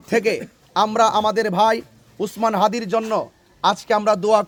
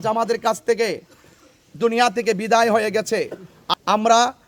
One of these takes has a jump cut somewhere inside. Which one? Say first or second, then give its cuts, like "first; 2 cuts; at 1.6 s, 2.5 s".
second; 1 cut; at 3.5 s